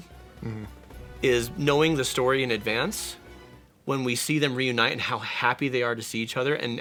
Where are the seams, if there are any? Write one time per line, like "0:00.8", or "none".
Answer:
none